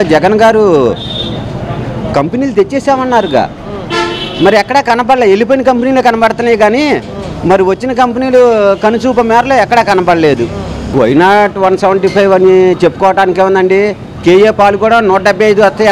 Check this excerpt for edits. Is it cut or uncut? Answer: cut